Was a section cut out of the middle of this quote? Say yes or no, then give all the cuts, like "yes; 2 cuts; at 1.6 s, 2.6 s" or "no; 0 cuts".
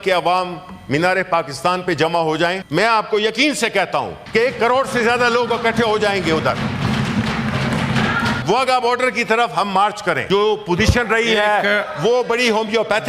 yes; 4 cuts; at 2.6 s, 4.2 s, 8.4 s, 10.2 s